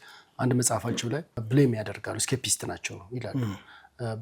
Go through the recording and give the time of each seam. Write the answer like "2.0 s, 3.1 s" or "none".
1.4 s